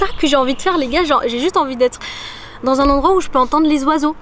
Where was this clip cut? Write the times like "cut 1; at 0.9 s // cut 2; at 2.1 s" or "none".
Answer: none